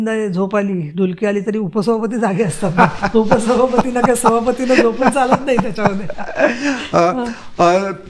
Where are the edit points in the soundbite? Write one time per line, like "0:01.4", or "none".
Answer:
none